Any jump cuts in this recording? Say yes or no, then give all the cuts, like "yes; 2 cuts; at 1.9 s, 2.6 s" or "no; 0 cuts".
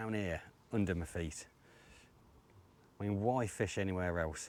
no; 0 cuts